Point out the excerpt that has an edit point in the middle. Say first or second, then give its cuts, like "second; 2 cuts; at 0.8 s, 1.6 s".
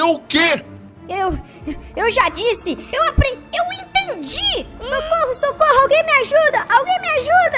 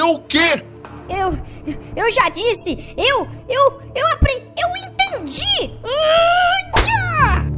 first; 2 cuts; at 2.8 s, 4.9 s